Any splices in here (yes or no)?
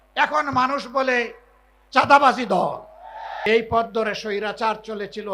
yes